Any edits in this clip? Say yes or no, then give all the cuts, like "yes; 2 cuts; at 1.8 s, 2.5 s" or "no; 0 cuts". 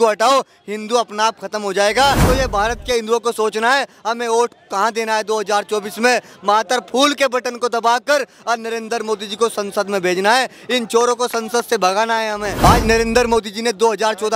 yes; 2 cuts; at 2.2 s, 12.5 s